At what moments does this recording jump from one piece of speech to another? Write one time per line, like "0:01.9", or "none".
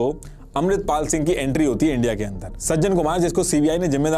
0:02.5